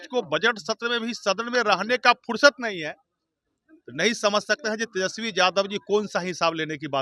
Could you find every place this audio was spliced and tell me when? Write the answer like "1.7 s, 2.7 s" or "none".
none